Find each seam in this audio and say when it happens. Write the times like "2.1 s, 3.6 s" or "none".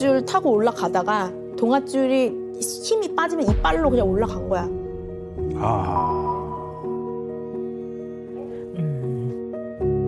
none